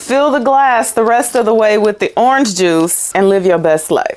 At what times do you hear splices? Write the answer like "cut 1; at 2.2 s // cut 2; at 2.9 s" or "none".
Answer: cut 1; at 3.0 s